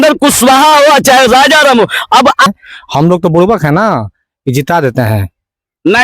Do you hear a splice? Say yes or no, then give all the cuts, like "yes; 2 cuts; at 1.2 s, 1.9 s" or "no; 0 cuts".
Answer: yes; 1 cut; at 2.5 s